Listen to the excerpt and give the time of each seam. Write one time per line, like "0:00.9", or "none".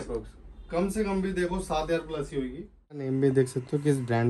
0:03.0